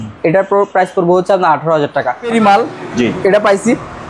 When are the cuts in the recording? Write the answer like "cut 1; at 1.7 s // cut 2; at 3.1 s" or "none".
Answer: cut 1; at 2.3 s